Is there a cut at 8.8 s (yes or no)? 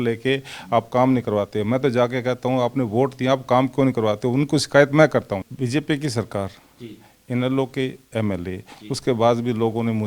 no